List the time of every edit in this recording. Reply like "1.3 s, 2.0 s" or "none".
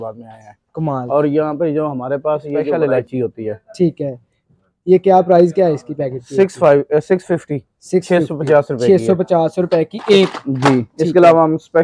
2.7 s